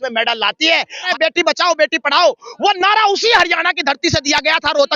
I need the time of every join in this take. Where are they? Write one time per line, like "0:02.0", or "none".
0:01.1